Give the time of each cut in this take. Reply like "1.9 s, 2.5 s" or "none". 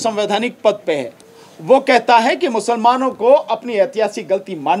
1.2 s